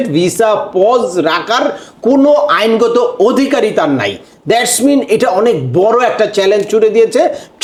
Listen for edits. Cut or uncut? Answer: uncut